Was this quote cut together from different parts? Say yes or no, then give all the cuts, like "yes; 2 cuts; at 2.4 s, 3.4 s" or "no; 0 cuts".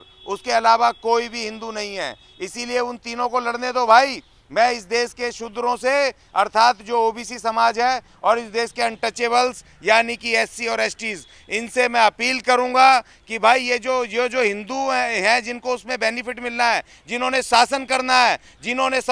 no; 0 cuts